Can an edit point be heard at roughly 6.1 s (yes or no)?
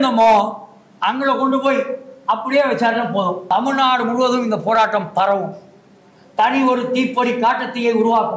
no